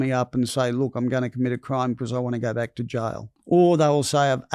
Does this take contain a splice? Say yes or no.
yes